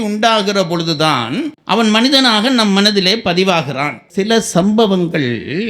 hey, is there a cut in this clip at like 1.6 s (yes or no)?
no